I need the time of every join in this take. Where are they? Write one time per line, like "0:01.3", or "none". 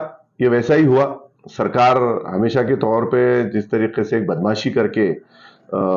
none